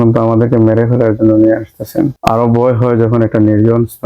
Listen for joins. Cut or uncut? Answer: cut